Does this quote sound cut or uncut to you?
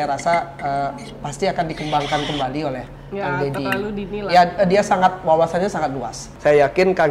cut